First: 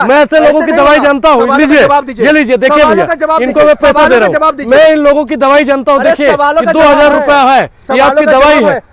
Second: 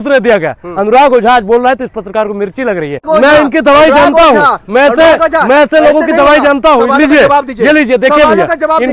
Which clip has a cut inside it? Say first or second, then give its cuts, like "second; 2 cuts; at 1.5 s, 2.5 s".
second; 1 cut; at 3.0 s